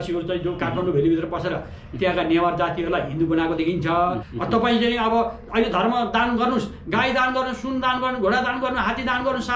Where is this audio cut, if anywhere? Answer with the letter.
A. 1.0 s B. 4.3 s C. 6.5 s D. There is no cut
B